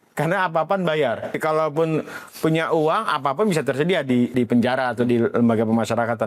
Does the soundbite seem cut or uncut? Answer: cut